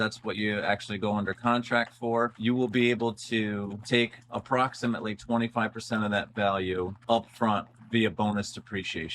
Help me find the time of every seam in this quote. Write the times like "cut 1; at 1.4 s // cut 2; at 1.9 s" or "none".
cut 1; at 2.3 s // cut 2; at 3.8 s // cut 3; at 7.0 s